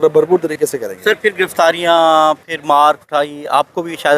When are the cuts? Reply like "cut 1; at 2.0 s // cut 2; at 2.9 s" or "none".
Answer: none